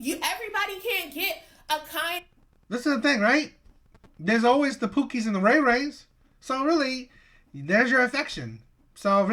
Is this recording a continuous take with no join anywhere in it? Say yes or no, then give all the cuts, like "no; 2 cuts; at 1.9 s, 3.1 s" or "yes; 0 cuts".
yes; 0 cuts